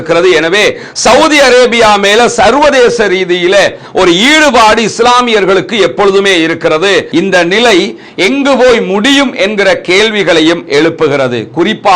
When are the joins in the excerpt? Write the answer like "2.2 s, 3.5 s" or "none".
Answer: 7.1 s